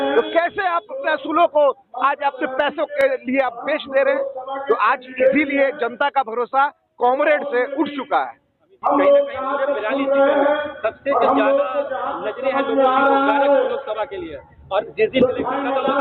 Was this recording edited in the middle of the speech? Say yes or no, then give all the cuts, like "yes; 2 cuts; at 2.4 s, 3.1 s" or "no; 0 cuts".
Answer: no; 0 cuts